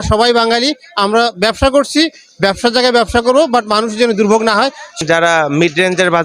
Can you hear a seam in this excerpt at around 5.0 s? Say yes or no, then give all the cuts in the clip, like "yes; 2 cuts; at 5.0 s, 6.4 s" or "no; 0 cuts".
yes; 1 cut; at 5.0 s